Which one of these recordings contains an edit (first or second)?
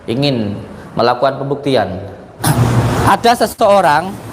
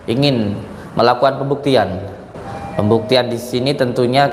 first